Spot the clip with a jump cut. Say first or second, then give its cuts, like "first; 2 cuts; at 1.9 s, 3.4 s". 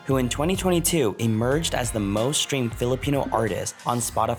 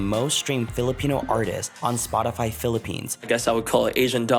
second; 1 cut; at 3.3 s